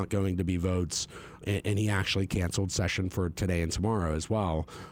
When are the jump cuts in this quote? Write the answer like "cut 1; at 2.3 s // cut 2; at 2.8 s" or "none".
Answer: none